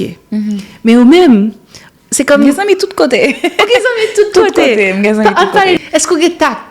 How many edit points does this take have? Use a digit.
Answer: 1